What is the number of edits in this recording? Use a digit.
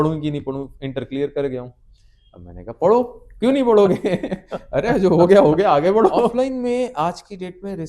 1